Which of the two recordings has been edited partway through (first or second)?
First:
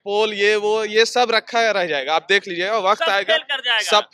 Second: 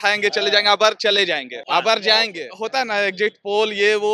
second